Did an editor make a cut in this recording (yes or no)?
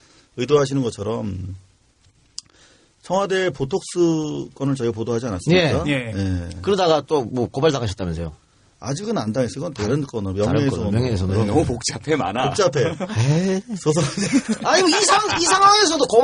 no